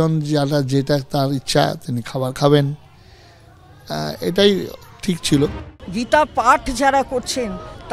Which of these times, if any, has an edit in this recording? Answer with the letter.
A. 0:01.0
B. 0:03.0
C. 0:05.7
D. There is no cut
C